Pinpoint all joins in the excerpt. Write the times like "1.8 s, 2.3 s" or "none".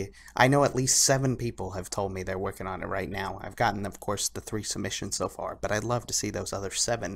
2.2 s